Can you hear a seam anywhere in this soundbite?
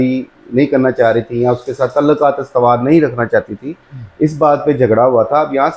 no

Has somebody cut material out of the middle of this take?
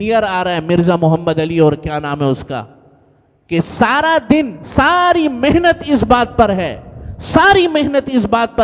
no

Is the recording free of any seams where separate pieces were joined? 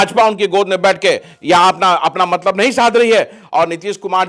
yes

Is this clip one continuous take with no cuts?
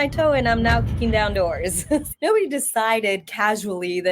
no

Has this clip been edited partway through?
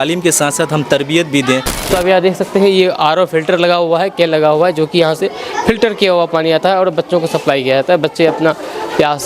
yes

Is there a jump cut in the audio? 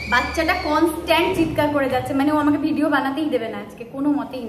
no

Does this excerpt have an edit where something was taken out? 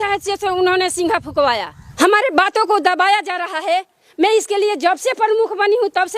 yes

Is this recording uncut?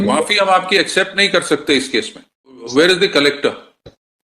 no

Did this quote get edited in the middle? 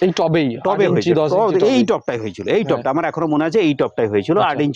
no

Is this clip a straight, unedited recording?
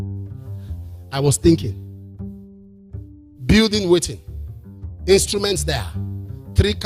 no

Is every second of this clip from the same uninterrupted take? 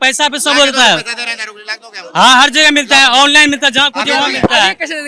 yes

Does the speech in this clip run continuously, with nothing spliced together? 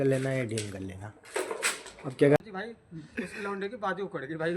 no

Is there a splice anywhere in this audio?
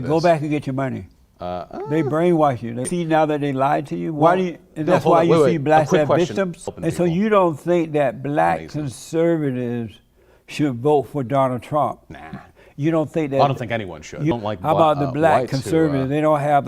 yes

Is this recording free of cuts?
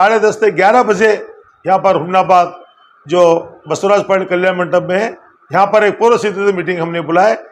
yes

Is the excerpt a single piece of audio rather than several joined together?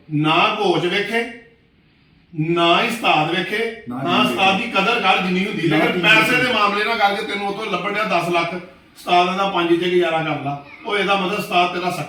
yes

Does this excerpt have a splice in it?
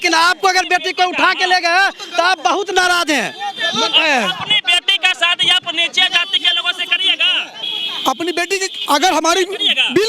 no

